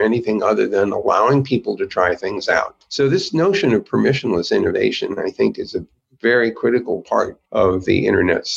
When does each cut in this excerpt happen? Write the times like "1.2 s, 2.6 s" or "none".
2.8 s, 7.4 s